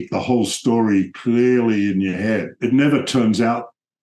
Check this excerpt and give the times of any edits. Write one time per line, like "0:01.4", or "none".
0:02.6